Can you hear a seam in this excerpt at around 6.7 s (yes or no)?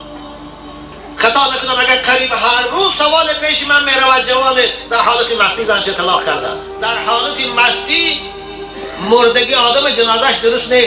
yes